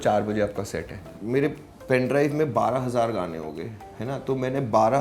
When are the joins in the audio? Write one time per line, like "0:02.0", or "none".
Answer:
0:01.2